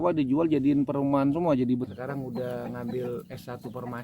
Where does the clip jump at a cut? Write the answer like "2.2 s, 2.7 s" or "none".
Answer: 1.9 s